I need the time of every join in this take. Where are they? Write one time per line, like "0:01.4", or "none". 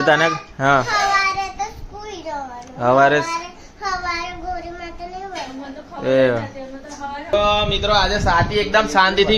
0:07.3

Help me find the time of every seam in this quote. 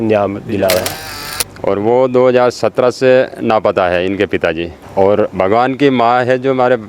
0:01.1
0:04.7

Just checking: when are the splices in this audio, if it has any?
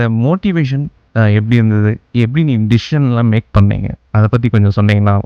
none

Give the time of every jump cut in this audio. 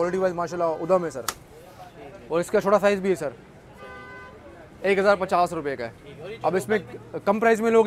none

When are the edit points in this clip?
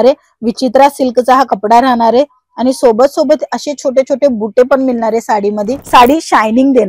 0:05.8

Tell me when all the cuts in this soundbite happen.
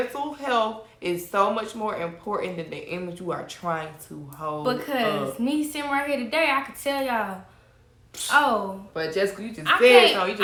none

